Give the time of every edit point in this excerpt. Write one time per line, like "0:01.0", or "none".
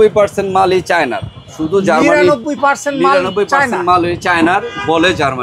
none